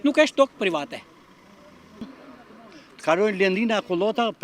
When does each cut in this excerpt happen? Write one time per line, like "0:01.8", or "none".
0:01.9